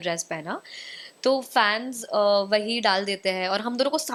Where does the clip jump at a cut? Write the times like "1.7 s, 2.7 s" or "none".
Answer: none